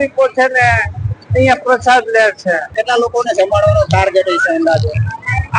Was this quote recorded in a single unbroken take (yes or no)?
no